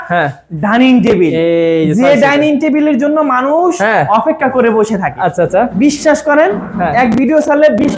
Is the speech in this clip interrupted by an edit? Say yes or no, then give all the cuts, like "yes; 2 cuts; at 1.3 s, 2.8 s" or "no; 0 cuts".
no; 0 cuts